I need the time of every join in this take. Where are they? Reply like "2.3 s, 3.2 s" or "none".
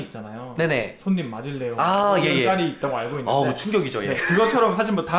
none